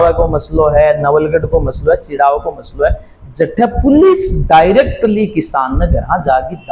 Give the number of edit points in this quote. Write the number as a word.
zero